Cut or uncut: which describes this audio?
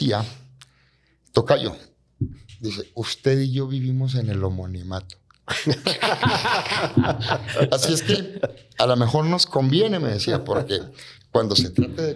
uncut